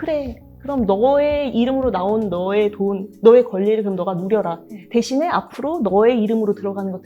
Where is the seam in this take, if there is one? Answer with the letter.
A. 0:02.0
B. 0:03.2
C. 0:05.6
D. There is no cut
D